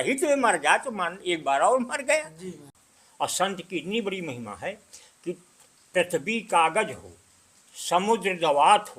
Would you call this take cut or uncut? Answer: cut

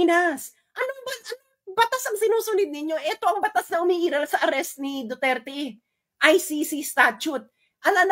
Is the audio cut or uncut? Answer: uncut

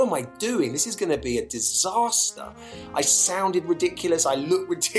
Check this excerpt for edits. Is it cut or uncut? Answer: uncut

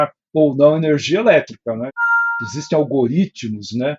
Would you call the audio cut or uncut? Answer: cut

